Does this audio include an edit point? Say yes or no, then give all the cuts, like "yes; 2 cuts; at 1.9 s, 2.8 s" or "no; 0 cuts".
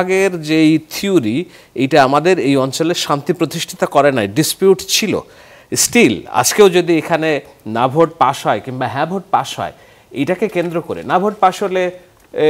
no; 0 cuts